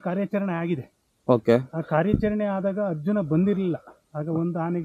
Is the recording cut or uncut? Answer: uncut